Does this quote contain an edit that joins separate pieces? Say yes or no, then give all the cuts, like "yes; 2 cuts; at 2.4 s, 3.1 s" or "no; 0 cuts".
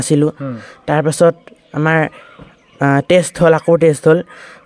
no; 0 cuts